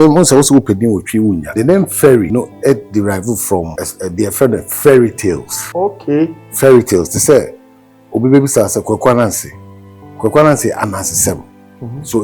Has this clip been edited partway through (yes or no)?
yes